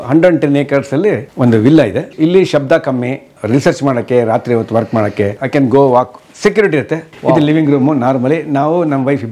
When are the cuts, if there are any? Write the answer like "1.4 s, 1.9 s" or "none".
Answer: 1.3 s, 2.1 s, 5.4 s, 7.0 s